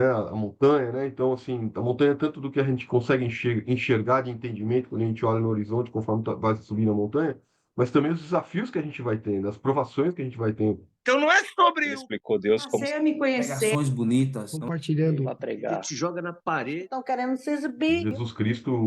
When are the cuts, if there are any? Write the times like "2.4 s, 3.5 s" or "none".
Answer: 10.9 s